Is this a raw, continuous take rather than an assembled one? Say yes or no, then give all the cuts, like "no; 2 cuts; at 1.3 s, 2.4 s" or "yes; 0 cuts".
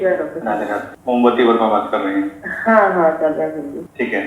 yes; 0 cuts